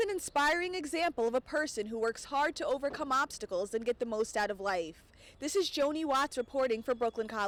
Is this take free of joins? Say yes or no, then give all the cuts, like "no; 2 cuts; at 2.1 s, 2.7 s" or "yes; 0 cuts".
yes; 0 cuts